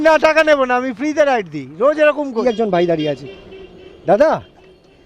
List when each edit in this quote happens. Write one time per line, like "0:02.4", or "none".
0:02.4